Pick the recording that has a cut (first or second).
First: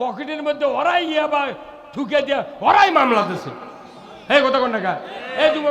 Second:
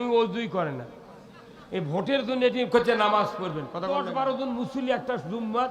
second